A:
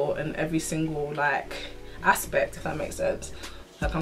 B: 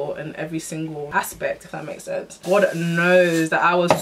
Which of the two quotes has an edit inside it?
B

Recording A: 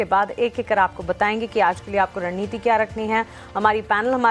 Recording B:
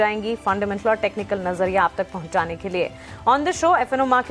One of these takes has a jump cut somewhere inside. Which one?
A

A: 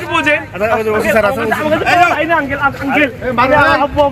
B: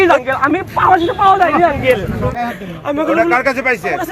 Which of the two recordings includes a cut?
B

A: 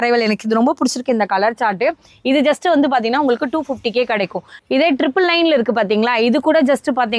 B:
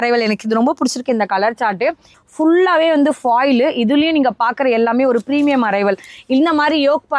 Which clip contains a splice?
B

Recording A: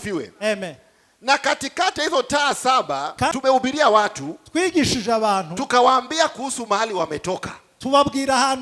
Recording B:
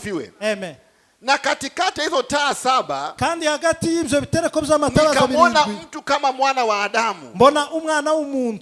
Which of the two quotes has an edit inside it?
A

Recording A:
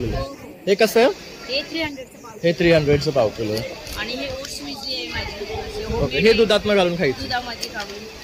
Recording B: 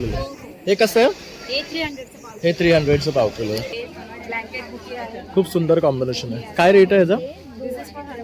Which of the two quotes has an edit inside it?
B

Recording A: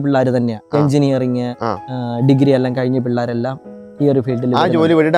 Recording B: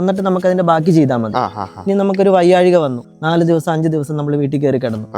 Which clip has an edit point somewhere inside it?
B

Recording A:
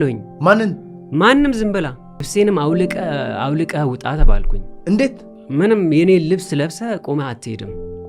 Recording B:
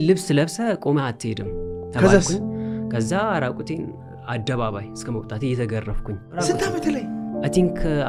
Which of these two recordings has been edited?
A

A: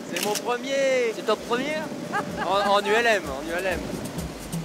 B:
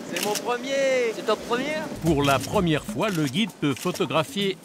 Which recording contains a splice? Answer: B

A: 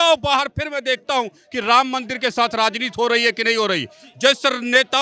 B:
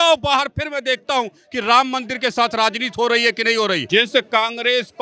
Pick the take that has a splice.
B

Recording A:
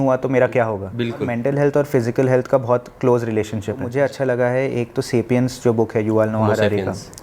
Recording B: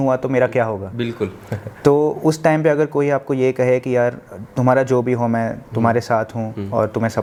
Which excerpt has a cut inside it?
A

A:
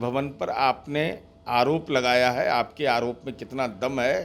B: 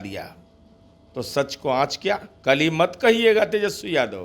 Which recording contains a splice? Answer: B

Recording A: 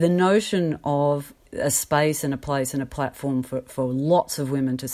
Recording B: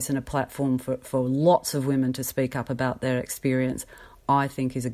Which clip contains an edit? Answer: A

